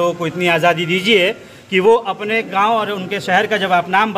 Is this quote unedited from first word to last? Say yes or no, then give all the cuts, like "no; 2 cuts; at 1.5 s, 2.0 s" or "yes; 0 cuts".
yes; 0 cuts